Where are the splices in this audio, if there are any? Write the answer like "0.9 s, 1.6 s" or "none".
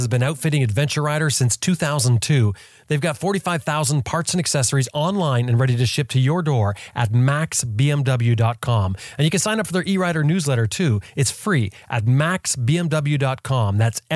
none